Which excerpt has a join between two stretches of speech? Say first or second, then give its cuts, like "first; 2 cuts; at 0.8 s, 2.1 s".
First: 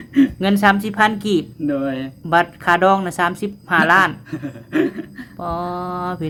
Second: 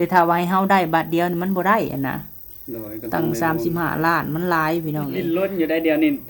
second; 1 cut; at 5.2 s